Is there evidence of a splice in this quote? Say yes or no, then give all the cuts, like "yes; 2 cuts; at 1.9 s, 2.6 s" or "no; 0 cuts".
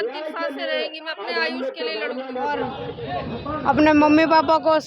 yes; 1 cut; at 2.8 s